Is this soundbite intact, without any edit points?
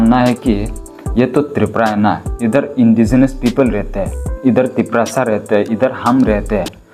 yes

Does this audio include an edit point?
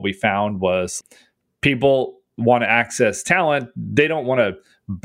yes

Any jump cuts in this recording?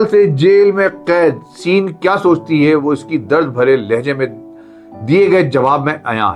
no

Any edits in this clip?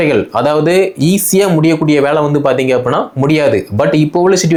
no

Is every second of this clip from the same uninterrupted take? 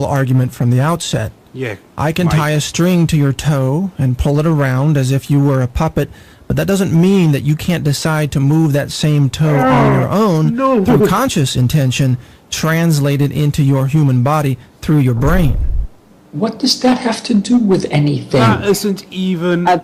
yes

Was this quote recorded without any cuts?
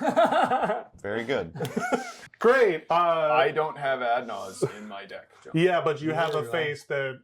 no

